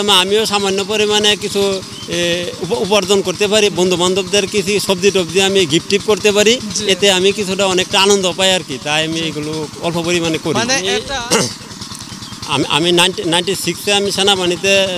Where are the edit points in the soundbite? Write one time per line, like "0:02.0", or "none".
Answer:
0:11.0